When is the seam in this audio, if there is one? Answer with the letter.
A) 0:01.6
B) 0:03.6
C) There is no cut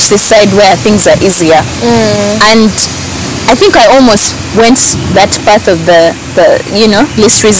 C